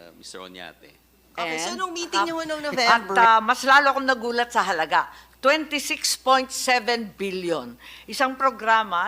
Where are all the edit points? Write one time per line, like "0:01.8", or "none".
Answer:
0:02.9